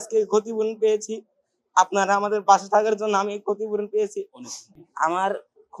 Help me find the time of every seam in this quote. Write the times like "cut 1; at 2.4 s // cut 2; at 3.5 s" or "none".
cut 1; at 4.9 s